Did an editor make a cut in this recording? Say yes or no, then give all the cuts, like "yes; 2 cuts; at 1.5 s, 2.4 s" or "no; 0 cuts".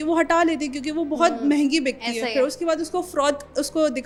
no; 0 cuts